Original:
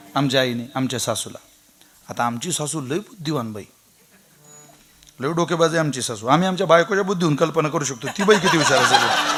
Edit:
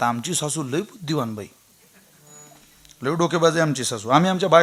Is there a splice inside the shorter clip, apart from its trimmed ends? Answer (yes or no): no